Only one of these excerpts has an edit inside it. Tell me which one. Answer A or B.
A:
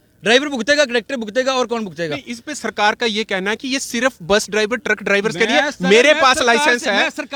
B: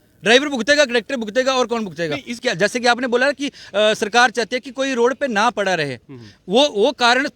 B